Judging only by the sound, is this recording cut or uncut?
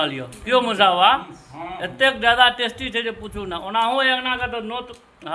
uncut